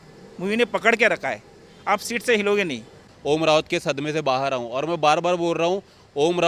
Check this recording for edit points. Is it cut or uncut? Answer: cut